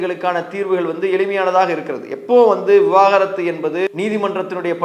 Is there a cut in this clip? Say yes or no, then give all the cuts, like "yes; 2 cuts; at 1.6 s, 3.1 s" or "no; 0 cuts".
yes; 1 cut; at 3.9 s